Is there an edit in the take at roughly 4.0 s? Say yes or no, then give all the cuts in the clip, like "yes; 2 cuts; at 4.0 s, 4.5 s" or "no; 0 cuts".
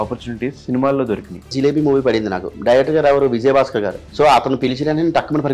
yes; 2 cuts; at 1.5 s, 4.0 s